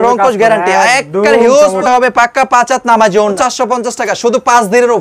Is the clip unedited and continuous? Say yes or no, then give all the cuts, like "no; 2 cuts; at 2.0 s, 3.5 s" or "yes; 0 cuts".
no; 2 cuts; at 1.8 s, 3.4 s